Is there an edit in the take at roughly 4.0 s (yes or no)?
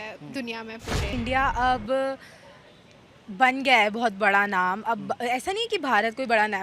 no